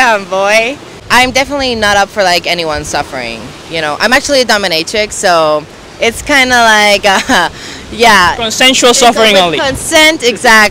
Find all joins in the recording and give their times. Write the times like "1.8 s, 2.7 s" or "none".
0.9 s